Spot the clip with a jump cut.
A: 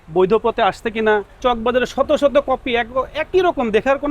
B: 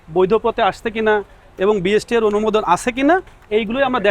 A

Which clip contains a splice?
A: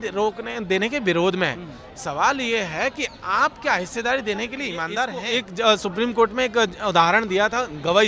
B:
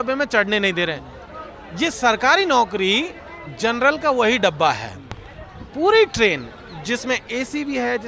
A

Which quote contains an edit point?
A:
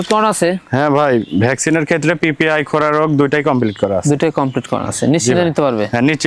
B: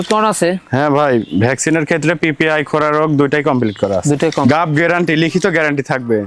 B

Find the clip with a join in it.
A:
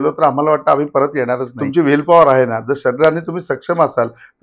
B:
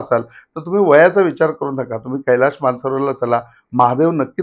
A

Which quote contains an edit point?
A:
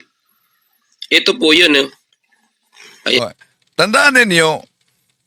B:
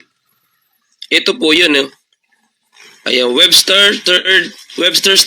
B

